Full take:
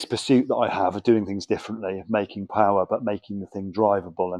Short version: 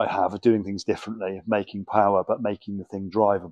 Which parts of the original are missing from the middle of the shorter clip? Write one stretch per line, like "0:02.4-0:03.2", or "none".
none